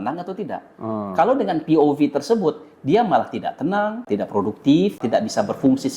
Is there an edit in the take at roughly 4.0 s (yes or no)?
yes